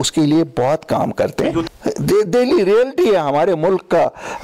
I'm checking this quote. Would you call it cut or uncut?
cut